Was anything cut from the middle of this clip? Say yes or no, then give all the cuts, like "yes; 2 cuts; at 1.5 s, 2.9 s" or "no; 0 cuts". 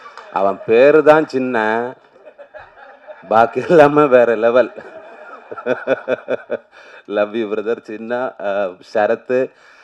no; 0 cuts